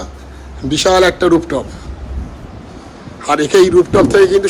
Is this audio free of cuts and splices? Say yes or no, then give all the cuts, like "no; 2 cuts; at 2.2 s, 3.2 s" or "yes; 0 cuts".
yes; 0 cuts